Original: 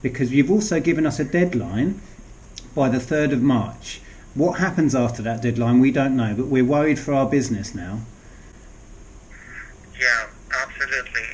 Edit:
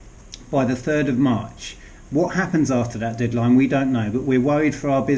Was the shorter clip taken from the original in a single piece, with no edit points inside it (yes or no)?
yes